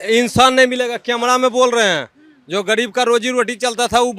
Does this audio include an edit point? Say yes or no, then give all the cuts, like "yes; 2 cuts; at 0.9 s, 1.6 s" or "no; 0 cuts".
no; 0 cuts